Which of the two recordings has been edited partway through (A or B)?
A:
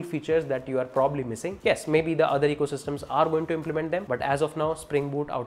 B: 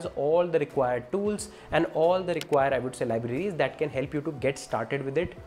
A